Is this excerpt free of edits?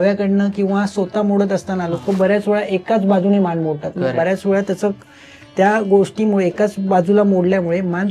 yes; 0 cuts

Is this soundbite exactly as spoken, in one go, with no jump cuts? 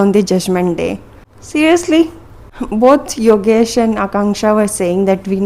yes; 0 cuts

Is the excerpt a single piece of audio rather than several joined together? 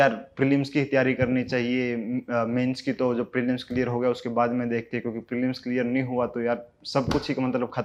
yes; 0 cuts

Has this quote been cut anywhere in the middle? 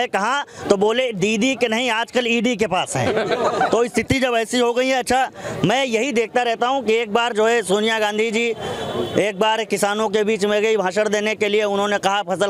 no; 0 cuts

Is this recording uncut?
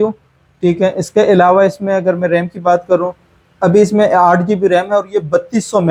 yes; 0 cuts

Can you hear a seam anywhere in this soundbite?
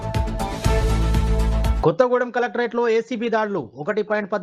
yes; 1 cut; at 1.7 s

